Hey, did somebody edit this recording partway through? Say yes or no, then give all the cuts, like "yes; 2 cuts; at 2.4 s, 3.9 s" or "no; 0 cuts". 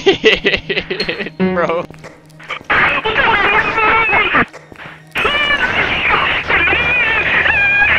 yes; 1 cut; at 1.9 s